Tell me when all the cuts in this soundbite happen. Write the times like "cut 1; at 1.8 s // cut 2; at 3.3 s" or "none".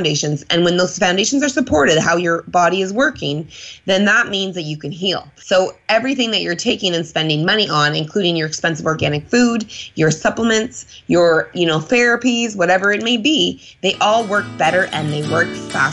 cut 1; at 5.3 s